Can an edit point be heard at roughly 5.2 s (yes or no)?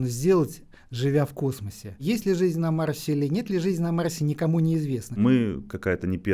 yes